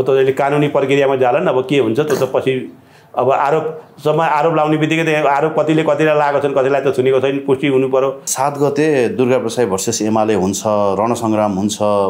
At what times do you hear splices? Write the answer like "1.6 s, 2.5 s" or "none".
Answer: 8.3 s